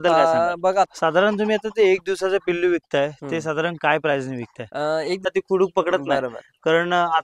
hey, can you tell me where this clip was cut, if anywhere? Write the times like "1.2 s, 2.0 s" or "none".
0.9 s, 5.3 s